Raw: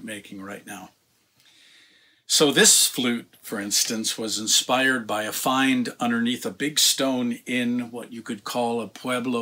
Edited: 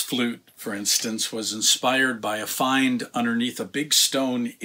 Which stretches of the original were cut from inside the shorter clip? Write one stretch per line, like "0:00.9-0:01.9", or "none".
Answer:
none